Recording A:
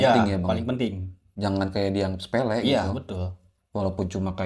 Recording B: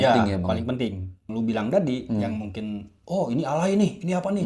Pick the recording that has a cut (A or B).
B